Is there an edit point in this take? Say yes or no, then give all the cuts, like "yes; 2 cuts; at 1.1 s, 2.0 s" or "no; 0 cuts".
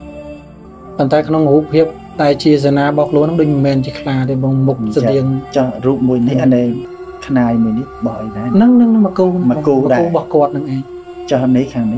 no; 0 cuts